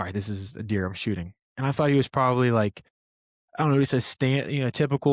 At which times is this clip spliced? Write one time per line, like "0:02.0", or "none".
none